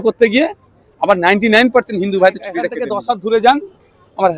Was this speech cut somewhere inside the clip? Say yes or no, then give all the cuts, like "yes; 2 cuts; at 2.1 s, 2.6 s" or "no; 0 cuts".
yes; 1 cut; at 2.8 s